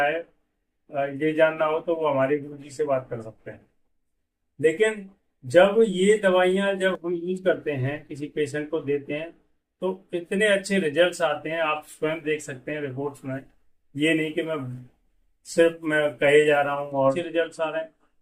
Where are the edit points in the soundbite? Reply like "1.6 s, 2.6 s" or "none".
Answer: 17.2 s